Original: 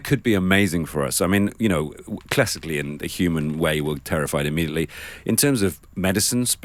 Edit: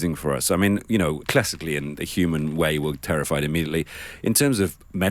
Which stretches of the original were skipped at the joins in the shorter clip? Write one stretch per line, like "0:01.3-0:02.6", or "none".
0:01.9-0:02.3